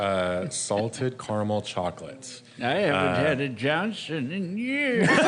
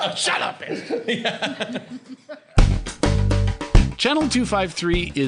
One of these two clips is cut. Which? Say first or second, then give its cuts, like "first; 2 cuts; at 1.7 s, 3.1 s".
second; 1 cut; at 2.4 s